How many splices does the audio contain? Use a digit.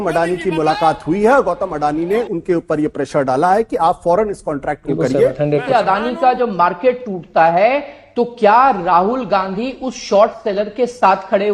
1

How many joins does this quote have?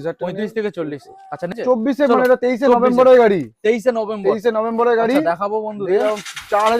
1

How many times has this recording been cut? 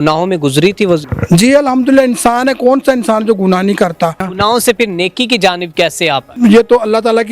3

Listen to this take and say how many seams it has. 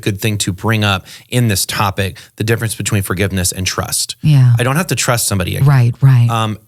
0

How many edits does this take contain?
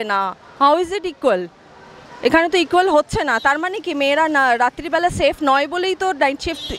0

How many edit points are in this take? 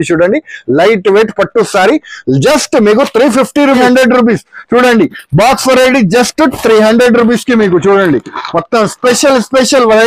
1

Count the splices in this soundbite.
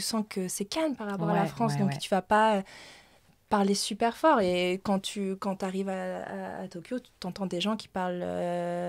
0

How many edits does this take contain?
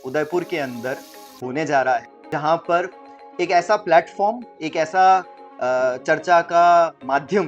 1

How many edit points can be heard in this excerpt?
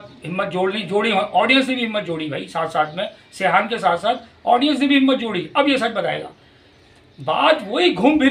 0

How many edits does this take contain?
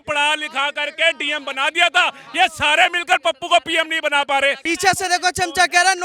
1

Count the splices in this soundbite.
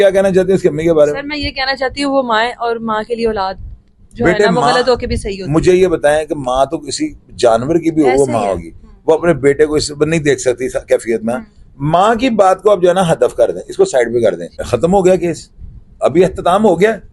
1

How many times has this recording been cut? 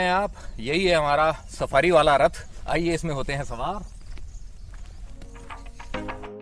0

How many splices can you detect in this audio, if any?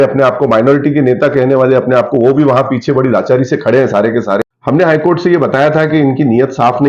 1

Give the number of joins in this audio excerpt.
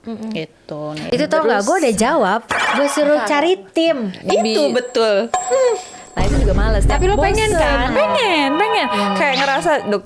2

